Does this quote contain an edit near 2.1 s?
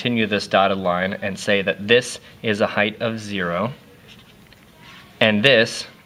no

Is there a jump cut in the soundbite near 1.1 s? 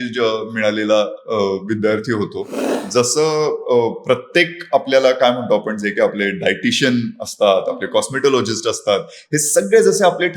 no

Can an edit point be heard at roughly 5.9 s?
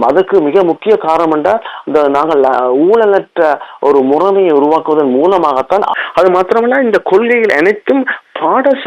yes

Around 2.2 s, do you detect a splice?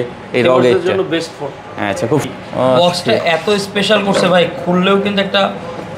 yes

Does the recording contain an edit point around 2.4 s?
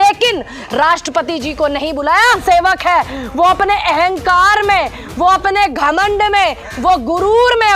yes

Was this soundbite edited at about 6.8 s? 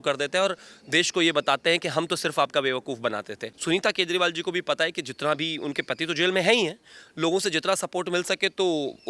no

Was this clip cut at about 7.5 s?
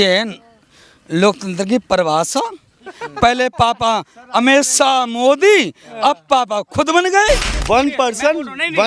yes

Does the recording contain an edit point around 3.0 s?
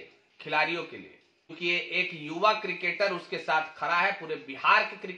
no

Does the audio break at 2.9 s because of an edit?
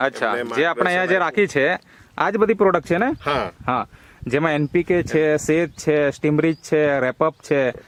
no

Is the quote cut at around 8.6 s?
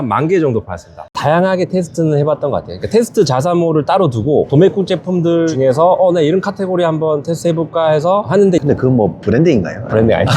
yes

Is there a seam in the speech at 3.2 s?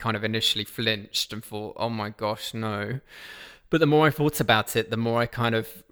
no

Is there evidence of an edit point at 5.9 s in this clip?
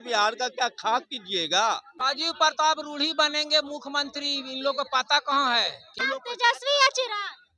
yes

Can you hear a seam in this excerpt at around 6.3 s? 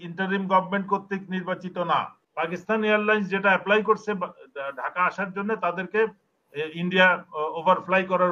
no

